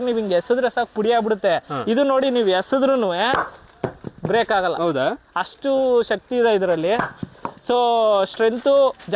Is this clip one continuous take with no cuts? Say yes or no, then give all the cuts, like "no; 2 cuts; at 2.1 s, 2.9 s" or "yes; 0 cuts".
yes; 0 cuts